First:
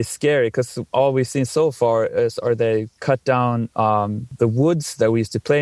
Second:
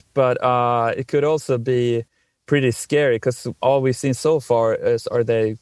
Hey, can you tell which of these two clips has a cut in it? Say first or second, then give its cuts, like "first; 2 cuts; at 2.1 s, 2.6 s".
first; 1 cut; at 4.3 s